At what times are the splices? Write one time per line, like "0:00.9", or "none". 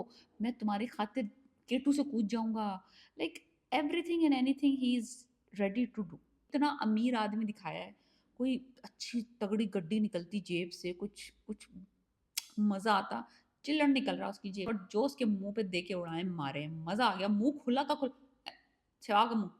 0:06.4
0:14.7